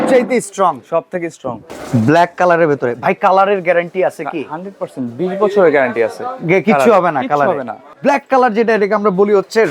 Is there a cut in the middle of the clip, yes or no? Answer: yes